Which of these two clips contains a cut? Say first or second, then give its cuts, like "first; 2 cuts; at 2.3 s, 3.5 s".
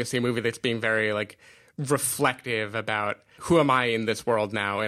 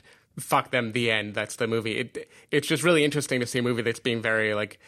first; 1 cut; at 3.3 s